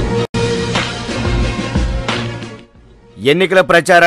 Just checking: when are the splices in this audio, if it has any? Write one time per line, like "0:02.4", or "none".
0:02.2